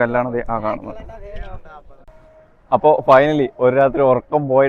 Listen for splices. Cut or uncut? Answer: cut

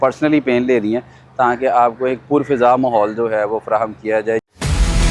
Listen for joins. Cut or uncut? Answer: uncut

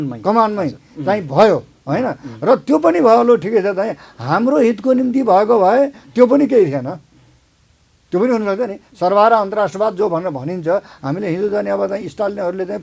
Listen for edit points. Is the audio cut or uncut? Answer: uncut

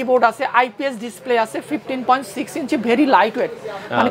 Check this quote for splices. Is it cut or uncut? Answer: uncut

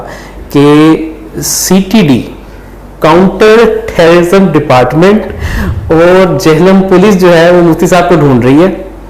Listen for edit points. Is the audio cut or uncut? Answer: uncut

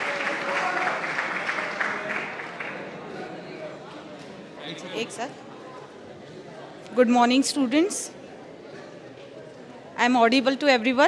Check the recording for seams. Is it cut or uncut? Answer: uncut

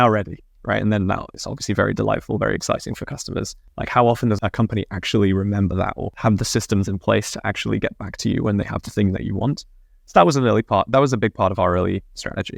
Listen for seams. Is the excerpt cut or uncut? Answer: uncut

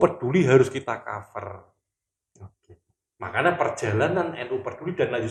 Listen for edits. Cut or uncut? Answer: uncut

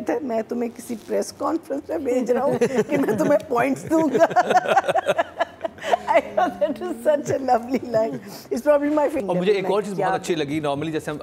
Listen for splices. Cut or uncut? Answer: cut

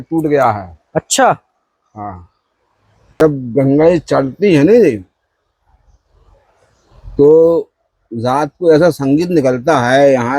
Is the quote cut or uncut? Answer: cut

